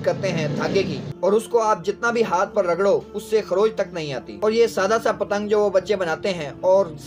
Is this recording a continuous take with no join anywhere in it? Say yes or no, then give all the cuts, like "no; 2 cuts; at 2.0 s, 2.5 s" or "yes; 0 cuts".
yes; 0 cuts